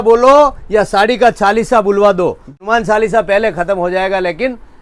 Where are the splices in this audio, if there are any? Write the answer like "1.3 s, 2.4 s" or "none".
2.6 s